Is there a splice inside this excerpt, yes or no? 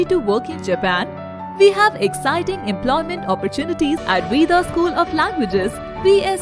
yes